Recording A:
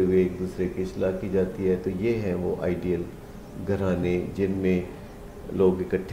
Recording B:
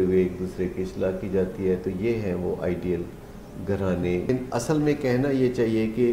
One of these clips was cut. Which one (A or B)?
B